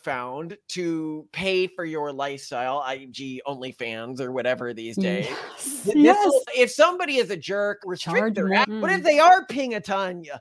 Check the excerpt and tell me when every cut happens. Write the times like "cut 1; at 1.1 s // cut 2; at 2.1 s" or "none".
cut 1; at 6.5 s // cut 2; at 7.8 s // cut 3; at 8.7 s